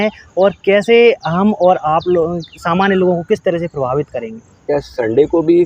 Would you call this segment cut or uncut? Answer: cut